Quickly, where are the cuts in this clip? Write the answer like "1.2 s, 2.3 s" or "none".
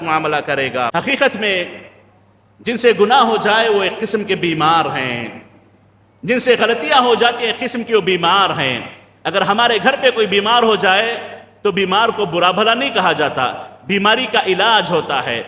0.9 s